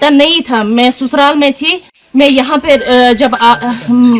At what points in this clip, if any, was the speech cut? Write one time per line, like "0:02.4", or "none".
0:01.9